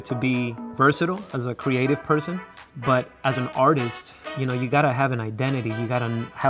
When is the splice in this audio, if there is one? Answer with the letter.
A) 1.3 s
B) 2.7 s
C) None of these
A